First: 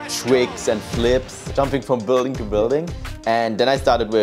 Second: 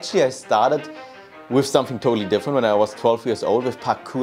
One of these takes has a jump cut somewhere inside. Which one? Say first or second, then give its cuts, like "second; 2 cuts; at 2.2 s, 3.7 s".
first; 2 cuts; at 1.5 s, 3.1 s